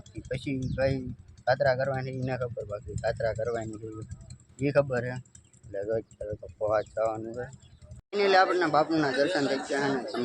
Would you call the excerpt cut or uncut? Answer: cut